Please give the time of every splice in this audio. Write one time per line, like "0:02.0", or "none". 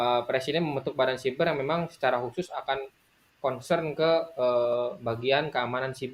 none